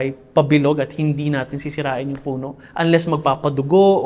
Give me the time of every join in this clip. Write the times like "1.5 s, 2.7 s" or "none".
none

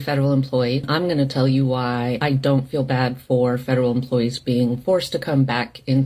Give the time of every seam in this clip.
0.9 s, 2.2 s

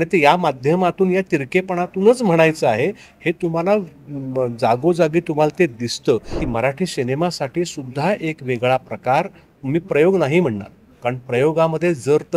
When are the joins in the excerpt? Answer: 6.4 s

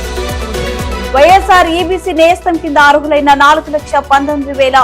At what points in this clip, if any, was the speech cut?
1.1 s

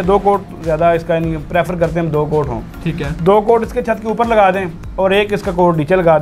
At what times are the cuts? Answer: none

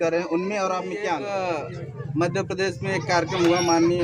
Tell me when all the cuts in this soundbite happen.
1.2 s

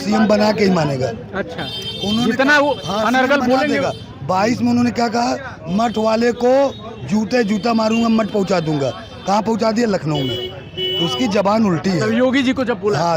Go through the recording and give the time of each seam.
none

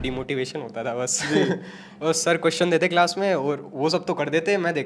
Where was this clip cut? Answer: none

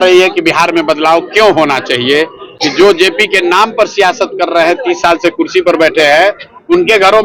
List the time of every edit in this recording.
none

